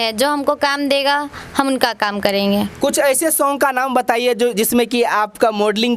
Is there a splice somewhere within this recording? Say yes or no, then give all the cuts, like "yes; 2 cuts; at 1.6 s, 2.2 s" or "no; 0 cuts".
no; 0 cuts